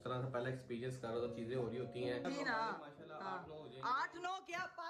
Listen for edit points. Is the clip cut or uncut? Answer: cut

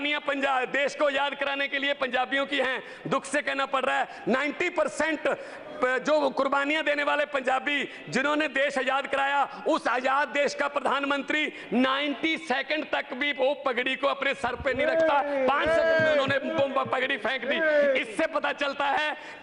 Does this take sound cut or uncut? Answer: uncut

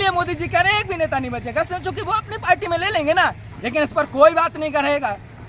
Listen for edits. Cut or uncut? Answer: uncut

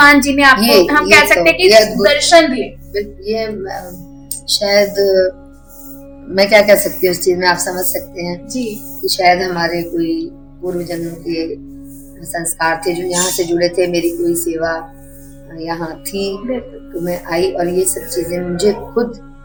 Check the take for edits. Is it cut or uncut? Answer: uncut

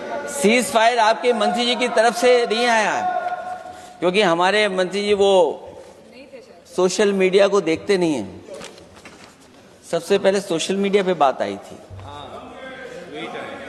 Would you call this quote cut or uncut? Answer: uncut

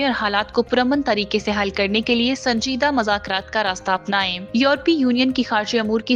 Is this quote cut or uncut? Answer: uncut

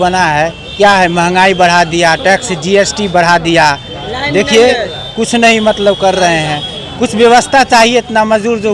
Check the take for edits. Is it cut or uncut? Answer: uncut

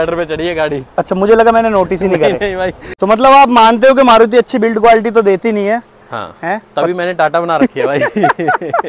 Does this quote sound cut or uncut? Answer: cut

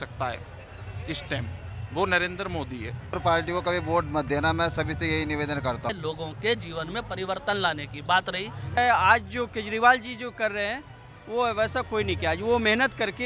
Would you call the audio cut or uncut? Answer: cut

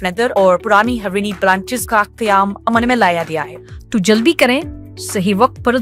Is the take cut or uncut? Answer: cut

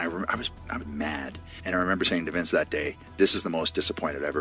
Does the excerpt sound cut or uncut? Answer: cut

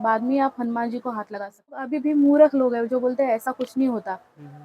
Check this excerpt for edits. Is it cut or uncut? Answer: cut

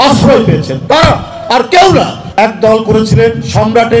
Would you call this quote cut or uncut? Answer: cut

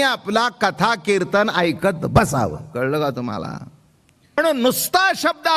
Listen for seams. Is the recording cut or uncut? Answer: cut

